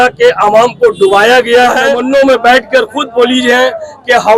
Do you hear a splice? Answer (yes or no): yes